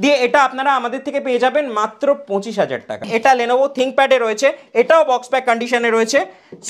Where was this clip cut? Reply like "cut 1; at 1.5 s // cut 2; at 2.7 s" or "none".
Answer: cut 1; at 3.0 s